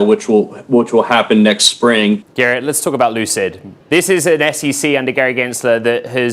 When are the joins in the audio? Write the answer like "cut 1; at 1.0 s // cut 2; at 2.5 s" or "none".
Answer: cut 1; at 2.3 s